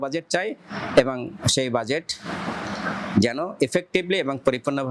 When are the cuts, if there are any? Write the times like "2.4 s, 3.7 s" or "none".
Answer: none

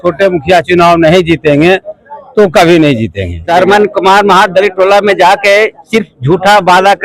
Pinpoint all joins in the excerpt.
3.5 s

